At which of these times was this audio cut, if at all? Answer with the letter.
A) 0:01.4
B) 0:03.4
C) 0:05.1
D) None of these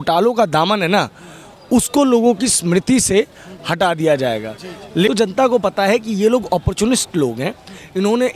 C